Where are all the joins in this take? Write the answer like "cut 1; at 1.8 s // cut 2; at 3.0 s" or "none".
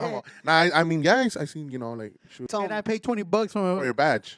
cut 1; at 2.5 s